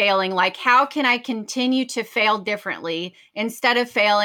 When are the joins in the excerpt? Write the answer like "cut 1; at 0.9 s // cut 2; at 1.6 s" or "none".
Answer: none